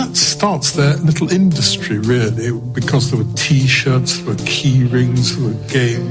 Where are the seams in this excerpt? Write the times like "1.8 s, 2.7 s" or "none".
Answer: none